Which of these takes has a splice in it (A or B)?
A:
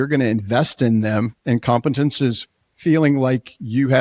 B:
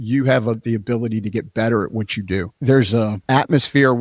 B